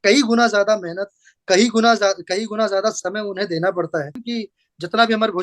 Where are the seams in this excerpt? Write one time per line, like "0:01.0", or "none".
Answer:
0:04.2